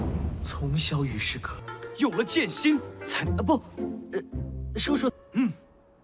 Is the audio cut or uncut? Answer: uncut